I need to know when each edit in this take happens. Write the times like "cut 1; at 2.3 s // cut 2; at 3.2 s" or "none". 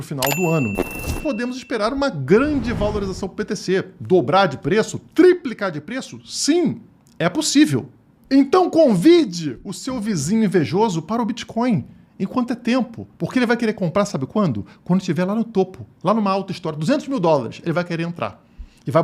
cut 1; at 1.2 s